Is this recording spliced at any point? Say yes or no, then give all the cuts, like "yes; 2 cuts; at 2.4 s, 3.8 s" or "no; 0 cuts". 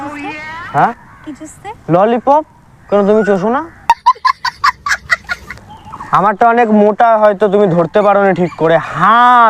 yes; 1 cut; at 5.5 s